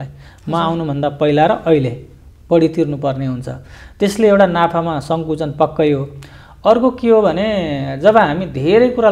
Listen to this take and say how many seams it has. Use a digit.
0